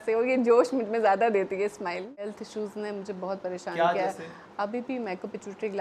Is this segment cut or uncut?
cut